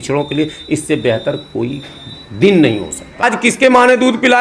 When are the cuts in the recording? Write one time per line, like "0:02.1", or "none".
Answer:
0:03.2